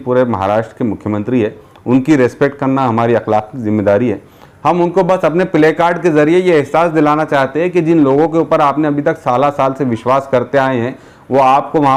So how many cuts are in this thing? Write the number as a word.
zero